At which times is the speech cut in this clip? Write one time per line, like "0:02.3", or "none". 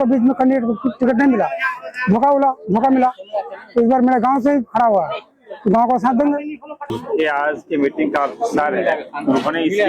0:06.8